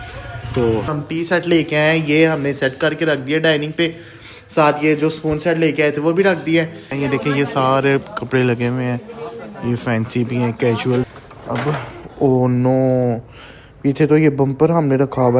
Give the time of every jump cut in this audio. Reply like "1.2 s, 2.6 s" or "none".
0.9 s, 6.9 s, 11.1 s